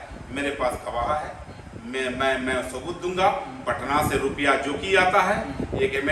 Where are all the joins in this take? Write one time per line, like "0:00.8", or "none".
none